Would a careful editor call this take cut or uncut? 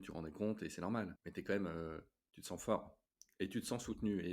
cut